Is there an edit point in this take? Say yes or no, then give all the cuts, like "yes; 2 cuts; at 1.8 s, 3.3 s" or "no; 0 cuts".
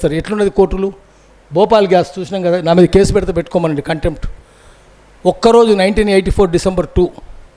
no; 0 cuts